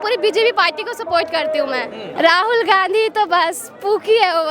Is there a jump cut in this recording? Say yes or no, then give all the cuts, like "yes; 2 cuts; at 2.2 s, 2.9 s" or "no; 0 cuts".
yes; 1 cut; at 2.0 s